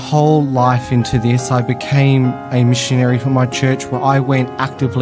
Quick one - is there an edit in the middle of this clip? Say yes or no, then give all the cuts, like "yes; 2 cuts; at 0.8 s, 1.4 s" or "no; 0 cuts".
no; 0 cuts